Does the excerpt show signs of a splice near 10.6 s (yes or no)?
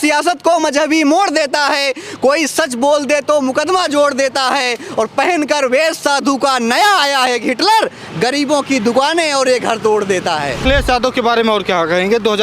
yes